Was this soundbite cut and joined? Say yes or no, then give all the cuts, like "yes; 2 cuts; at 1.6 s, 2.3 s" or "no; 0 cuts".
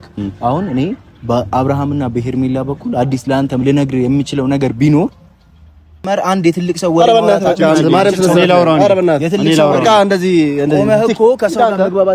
yes; 1 cut; at 6.1 s